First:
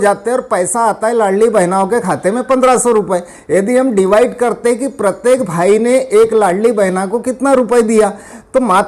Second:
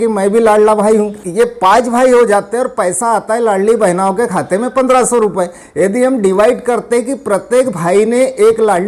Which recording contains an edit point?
second; 1 cut; at 1.2 s

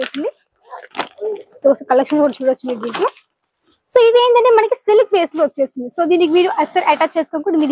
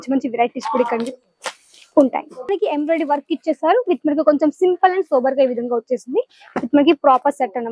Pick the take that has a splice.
second; 1 cut; at 2.5 s

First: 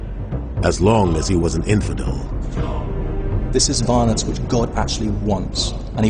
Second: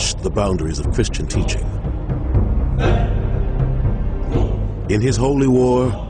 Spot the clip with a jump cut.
second; 1 cut; at 1.6 s

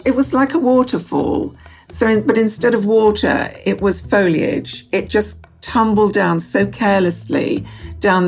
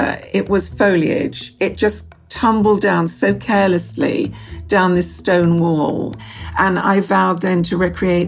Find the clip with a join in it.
second; 1 cut; at 6.2 s

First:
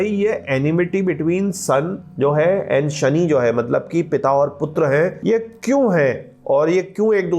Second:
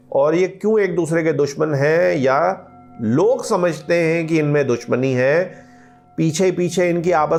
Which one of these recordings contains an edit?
first; 2 cuts; at 2.0 s, 5.2 s

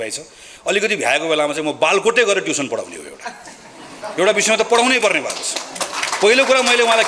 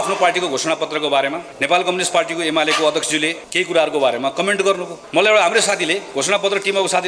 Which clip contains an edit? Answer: second; 3 cuts; at 1.5 s, 3.4 s, 4.9 s

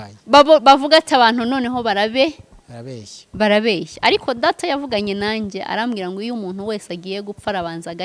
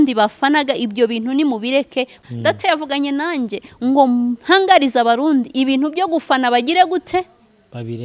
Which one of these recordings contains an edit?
second; 1 cut; at 2.2 s

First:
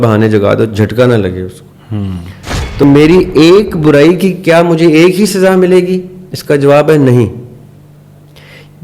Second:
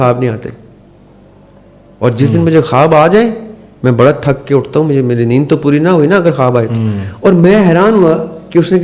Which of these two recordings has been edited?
first; 1 cut; at 2.8 s

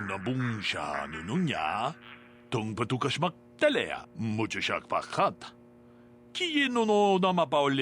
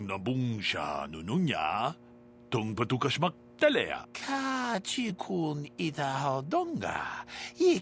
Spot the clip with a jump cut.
first; 1 cut; at 4.2 s

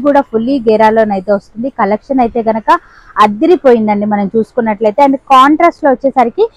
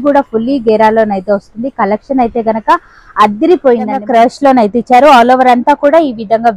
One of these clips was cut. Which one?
second; 1 cut; at 4.0 s

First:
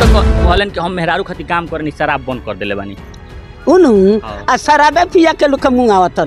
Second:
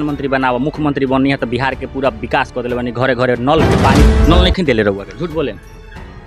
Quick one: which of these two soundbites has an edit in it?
second; 1 cut; at 4.0 s

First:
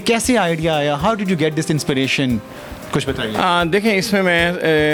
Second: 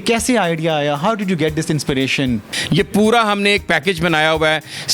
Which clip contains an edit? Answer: second; 1 cut; at 2.5 s

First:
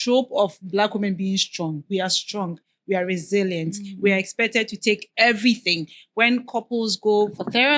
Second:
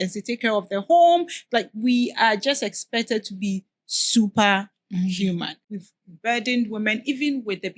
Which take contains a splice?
second; 1 cut; at 5.7 s

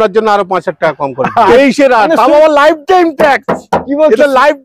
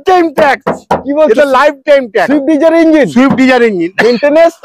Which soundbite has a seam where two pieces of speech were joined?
first; 1 cut; at 1.5 s

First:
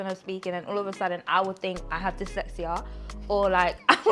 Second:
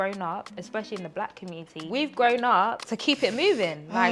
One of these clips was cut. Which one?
second; 2 cuts; at 1.9 s, 2.9 s

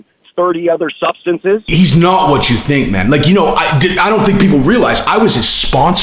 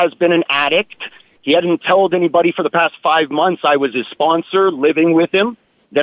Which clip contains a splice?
first; 1 cut; at 1.7 s

